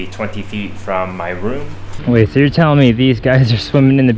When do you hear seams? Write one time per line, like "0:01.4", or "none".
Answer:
0:01.9